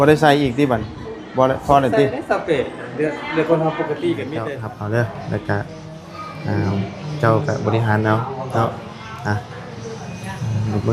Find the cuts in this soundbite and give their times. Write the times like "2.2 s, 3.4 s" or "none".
4.6 s